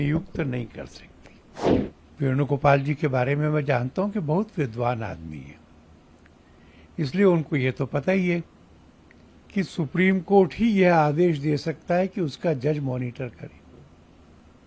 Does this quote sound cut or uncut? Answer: cut